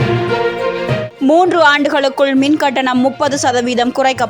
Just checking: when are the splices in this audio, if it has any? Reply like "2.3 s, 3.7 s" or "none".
1.0 s